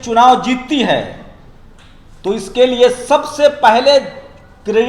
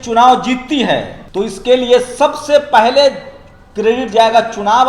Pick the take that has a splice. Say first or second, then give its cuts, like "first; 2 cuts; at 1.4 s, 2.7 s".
second; 1 cut; at 1.2 s